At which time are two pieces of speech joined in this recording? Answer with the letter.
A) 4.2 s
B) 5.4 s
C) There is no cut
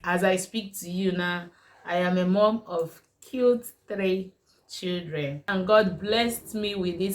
B